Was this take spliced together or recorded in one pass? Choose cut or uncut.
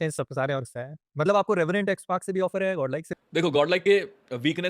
cut